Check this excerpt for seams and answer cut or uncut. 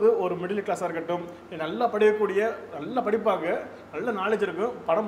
uncut